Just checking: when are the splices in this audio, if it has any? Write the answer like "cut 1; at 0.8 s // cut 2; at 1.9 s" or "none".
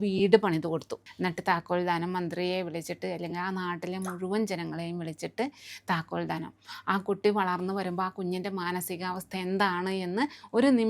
cut 1; at 1.0 s